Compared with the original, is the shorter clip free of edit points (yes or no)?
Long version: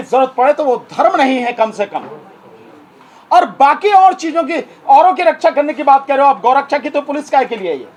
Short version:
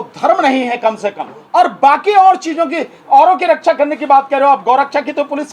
no